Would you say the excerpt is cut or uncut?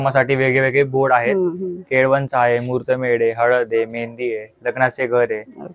uncut